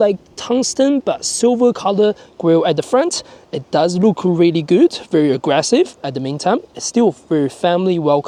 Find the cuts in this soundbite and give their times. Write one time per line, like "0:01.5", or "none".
none